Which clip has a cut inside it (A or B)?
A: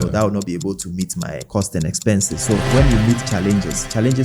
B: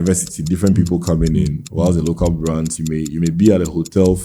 A